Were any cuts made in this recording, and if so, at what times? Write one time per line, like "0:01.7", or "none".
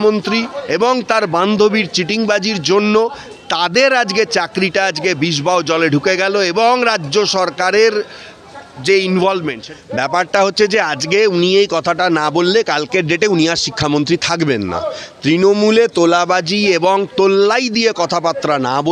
0:09.6